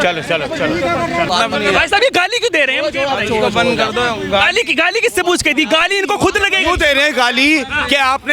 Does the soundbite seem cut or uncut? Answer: cut